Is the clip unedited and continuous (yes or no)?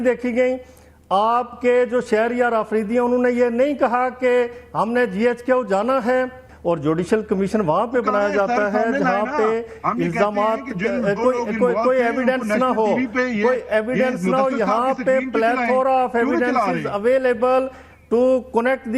no